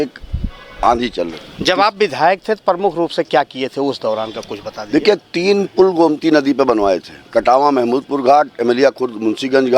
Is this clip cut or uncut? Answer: cut